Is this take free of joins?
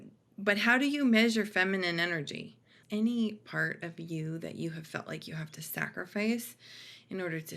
no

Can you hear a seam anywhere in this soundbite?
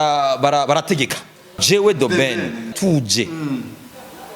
yes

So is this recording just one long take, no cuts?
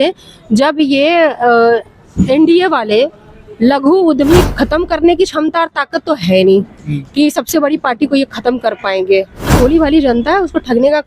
no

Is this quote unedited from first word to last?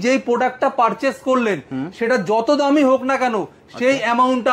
yes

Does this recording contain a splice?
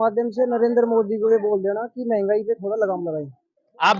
no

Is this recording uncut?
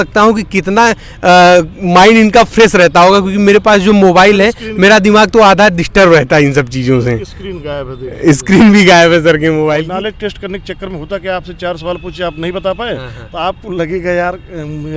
no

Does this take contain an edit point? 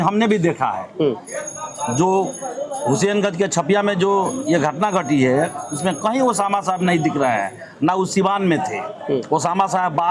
no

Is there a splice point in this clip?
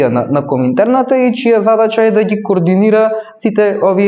no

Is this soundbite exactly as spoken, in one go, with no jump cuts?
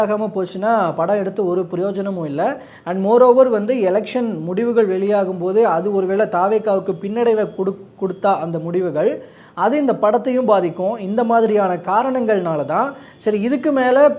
yes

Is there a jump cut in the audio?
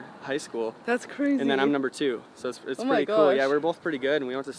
no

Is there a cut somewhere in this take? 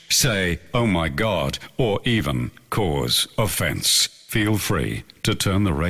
no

